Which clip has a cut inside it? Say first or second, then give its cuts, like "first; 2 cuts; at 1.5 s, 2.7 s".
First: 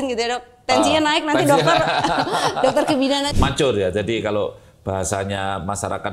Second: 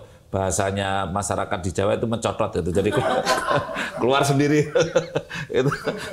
first; 1 cut; at 3.3 s